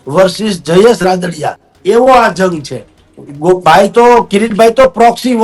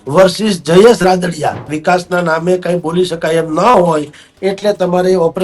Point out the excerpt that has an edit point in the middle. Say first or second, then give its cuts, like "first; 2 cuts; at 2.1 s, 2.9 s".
second; 1 cut; at 1.7 s